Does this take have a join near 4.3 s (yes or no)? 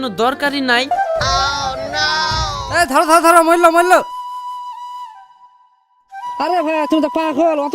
no